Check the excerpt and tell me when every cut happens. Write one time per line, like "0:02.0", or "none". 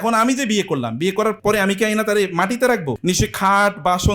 0:01.4
0:02.9